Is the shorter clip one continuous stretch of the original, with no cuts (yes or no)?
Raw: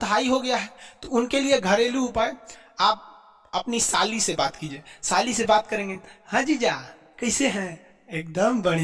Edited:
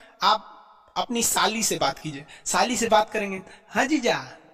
yes